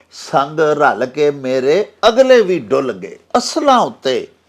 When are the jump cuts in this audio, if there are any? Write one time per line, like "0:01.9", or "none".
0:03.1